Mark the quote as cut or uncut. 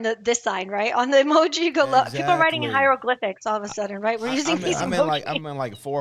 uncut